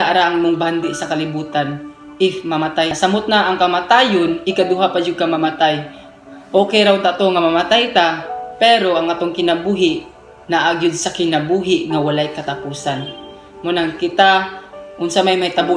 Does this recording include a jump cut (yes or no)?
yes